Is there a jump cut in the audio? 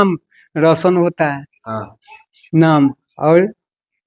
no; 0 cuts

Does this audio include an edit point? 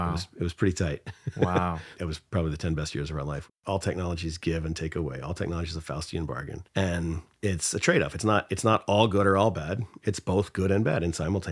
yes; 3 cuts; at 1.9 s, 3.5 s, 6.6 s

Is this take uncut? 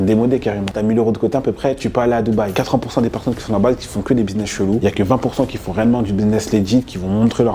no; 2 cuts; at 0.8 s, 2.5 s

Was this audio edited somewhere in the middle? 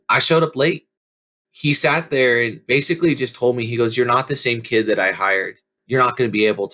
yes; 3 cuts; at 0.9 s, 2.6 s, 5.7 s

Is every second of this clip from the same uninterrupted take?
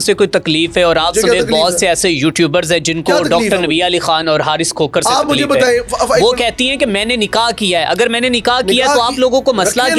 yes; 0 cuts

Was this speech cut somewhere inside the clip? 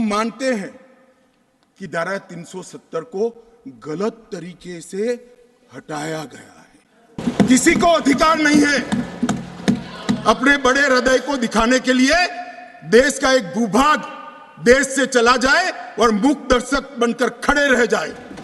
yes; 1 cut; at 7.2 s

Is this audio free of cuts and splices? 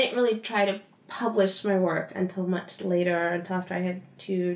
yes; 0 cuts

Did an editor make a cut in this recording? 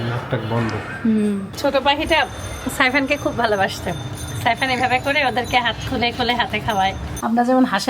yes; 2 cuts; at 1.5 s, 7.1 s

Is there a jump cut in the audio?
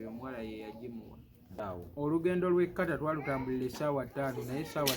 yes; 1 cut; at 1.6 s

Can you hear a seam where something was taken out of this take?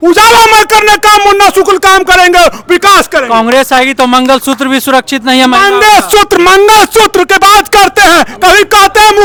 no; 0 cuts

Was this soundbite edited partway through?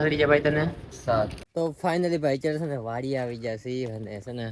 yes; 1 cut; at 1.4 s

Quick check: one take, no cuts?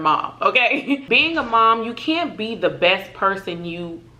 no; 1 cut; at 1.0 s

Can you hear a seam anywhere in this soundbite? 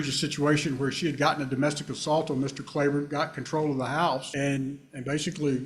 no; 0 cuts

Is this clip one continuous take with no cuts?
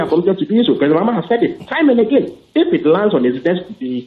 yes; 0 cuts

